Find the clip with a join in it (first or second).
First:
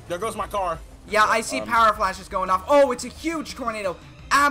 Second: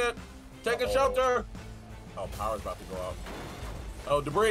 first